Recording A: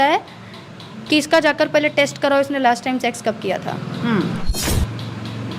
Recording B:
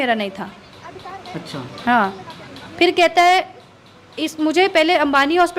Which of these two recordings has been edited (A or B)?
A